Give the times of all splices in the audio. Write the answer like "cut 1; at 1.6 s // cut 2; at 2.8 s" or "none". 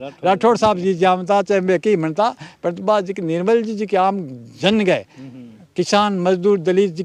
none